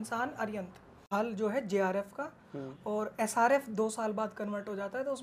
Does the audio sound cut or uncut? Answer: cut